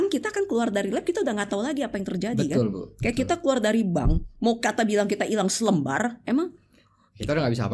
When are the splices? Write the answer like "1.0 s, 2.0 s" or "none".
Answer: none